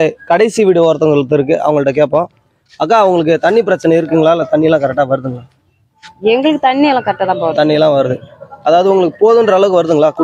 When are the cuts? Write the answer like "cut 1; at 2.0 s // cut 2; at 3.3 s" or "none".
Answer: none